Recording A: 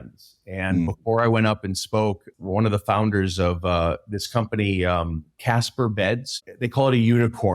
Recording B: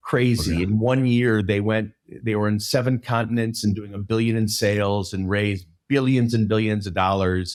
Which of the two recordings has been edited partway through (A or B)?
A